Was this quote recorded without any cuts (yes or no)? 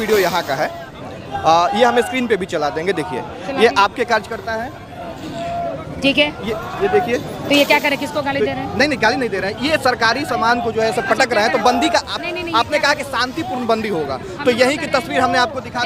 yes